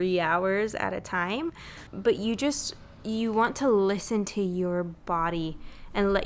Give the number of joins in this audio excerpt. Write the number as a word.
zero